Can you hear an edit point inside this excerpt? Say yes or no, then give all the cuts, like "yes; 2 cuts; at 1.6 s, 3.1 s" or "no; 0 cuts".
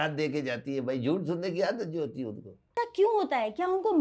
no; 0 cuts